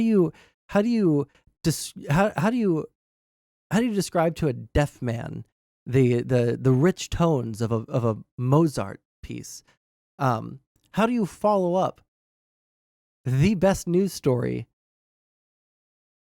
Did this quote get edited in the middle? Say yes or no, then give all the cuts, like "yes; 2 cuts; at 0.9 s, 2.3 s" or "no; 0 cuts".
no; 0 cuts